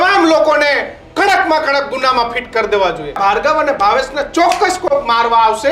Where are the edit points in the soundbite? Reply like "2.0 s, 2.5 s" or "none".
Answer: 3.2 s